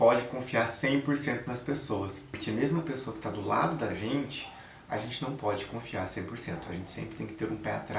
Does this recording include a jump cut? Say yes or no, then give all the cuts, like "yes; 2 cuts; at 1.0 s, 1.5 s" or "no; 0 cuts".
yes; 1 cut; at 2.3 s